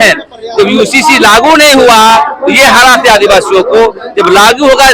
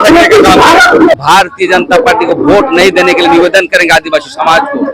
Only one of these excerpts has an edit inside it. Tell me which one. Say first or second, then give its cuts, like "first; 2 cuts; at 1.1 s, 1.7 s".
second; 1 cut; at 1.1 s